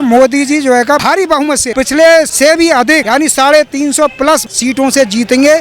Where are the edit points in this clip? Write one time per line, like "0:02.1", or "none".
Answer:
0:01.5
0:02.7
0:04.5